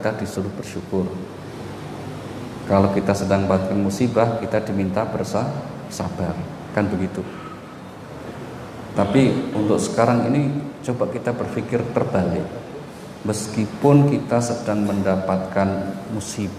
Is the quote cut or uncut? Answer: uncut